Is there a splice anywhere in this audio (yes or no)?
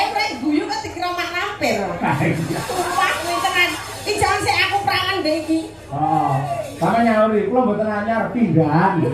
yes